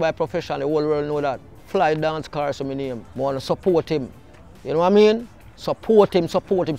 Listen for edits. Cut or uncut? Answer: cut